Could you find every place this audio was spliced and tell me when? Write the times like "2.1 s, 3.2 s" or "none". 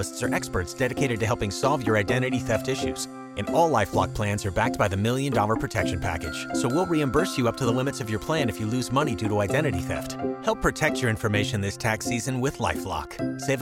none